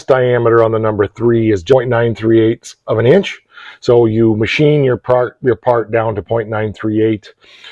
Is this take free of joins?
no; 1 cut; at 1.7 s

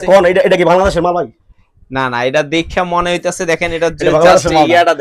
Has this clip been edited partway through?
no; 0 cuts

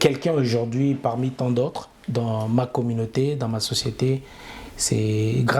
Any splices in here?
no; 0 cuts

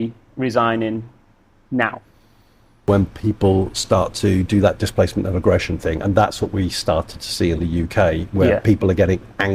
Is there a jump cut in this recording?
yes; 1 cut; at 2.9 s

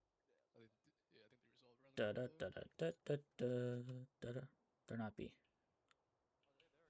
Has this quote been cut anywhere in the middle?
no; 0 cuts

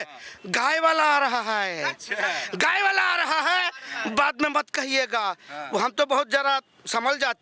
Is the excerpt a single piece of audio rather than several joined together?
yes; 0 cuts

